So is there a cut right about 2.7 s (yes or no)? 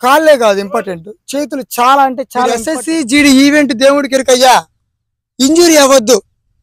yes